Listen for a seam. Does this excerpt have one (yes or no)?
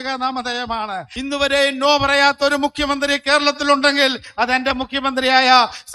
yes